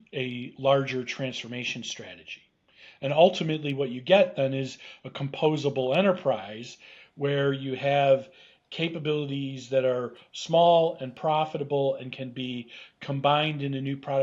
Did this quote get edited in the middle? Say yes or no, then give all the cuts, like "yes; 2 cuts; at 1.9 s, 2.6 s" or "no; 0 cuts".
no; 0 cuts